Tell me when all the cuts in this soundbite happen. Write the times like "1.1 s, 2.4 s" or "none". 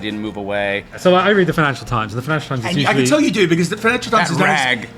1.0 s

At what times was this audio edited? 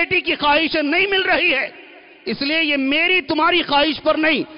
none

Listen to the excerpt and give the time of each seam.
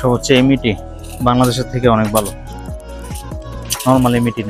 2.3 s, 3.7 s

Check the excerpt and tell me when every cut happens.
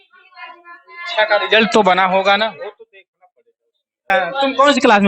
4.1 s

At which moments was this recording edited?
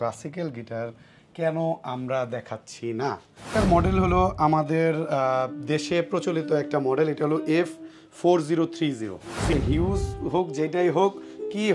3.5 s, 9.5 s

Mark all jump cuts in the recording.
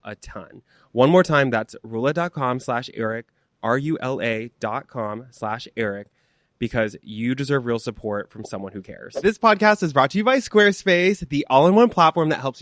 9.2 s

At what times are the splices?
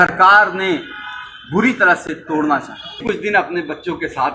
3.0 s

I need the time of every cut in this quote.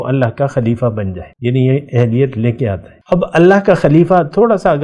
1.2 s, 2.9 s

